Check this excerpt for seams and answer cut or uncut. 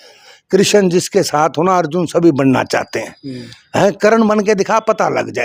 uncut